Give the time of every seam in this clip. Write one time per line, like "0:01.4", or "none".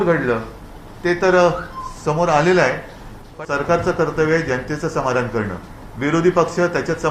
0:03.4